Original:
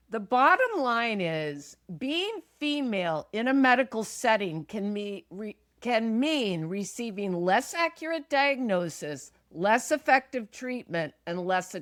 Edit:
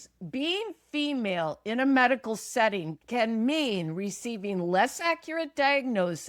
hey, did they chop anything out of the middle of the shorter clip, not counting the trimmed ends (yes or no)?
yes